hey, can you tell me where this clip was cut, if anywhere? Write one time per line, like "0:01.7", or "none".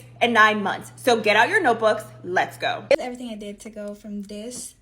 0:02.9